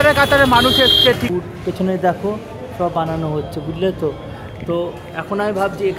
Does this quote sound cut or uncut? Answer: cut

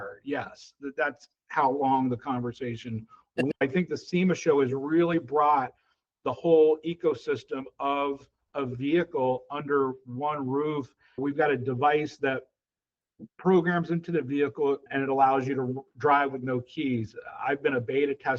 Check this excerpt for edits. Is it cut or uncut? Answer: cut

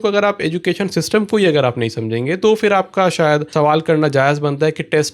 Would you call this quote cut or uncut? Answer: cut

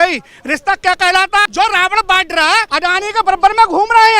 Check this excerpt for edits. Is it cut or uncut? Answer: cut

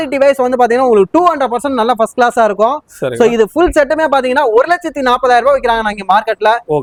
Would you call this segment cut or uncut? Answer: uncut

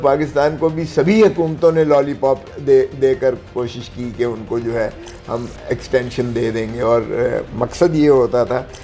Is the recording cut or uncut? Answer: uncut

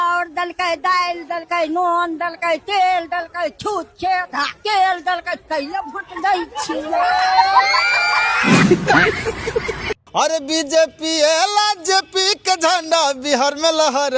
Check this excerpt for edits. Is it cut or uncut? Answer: cut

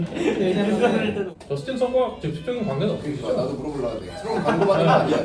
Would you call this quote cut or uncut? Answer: cut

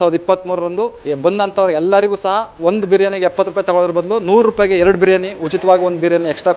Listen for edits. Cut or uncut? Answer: cut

